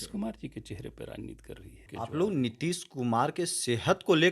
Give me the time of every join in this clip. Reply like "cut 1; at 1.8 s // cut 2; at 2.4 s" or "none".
cut 1; at 1.8 s